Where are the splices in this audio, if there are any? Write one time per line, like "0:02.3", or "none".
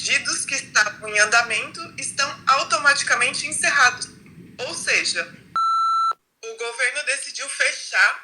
0:05.9